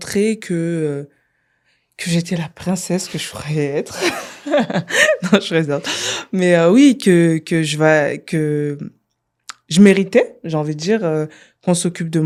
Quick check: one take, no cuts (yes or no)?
yes